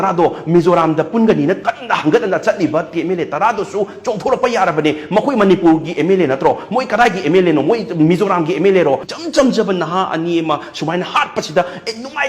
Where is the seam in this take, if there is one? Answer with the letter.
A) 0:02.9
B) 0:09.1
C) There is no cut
B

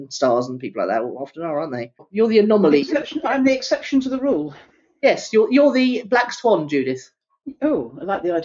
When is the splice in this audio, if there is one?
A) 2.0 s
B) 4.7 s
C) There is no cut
A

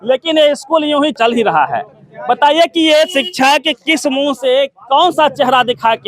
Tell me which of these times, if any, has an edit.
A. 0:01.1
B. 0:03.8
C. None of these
A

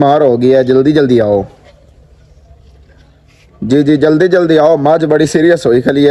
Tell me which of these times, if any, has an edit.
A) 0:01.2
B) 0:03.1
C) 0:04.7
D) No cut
D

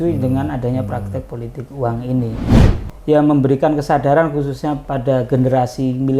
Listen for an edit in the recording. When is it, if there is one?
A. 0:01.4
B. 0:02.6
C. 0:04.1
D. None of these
B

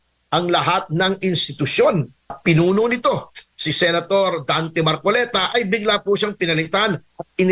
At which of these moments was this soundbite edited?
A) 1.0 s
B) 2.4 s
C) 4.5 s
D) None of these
B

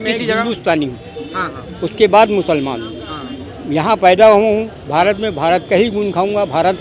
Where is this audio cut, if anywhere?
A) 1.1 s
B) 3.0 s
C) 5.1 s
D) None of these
D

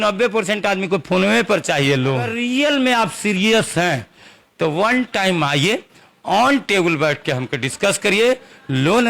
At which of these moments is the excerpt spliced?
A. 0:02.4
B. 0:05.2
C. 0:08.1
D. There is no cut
A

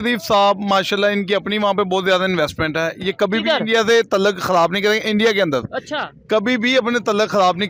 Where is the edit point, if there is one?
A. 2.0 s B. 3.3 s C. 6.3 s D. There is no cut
D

